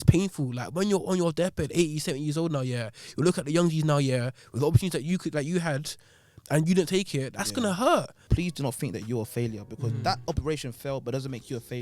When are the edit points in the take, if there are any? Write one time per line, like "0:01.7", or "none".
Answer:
0:08.2